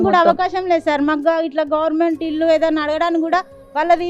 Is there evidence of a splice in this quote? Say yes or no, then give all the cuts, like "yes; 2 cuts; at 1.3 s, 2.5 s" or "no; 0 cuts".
no; 0 cuts